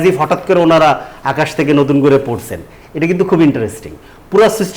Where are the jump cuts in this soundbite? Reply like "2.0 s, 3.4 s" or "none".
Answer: none